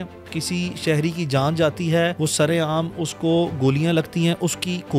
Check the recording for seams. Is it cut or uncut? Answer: cut